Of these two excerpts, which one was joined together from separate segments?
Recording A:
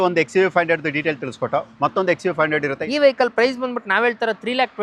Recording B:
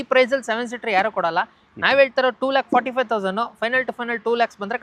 A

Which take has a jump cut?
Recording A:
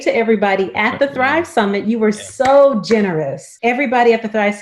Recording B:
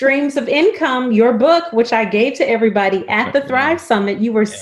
A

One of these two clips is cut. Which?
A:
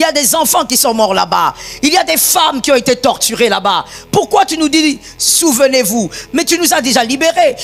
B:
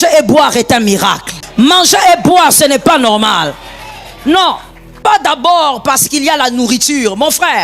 B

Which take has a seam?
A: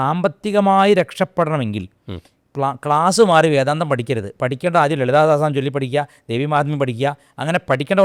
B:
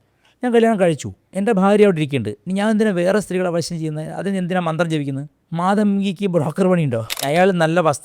B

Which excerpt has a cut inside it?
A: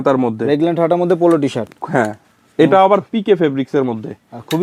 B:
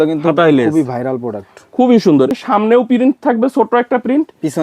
B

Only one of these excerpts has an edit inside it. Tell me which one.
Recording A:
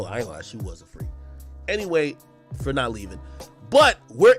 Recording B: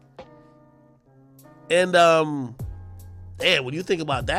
A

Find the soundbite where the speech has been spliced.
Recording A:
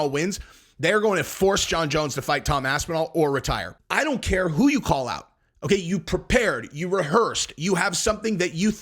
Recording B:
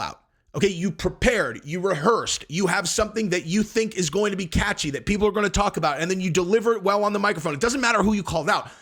A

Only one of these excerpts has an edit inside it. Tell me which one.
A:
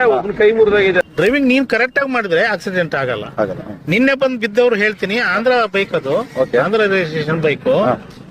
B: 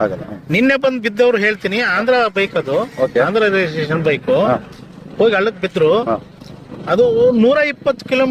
A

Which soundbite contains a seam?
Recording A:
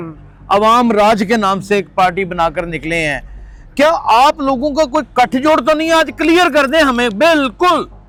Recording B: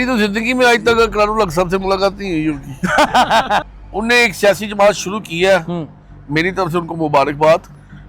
B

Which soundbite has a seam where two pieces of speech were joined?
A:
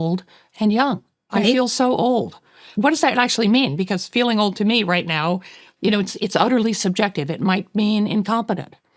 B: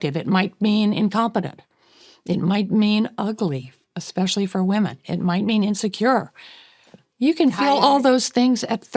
A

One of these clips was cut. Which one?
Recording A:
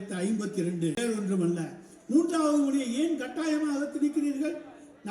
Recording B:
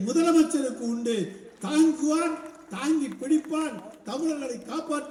A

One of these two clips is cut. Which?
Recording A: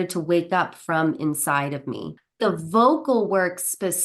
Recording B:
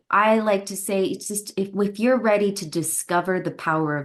A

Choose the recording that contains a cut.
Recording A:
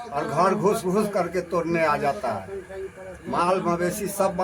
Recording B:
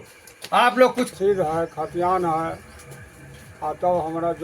B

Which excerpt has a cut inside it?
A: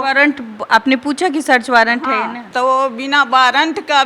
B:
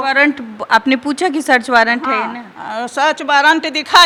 A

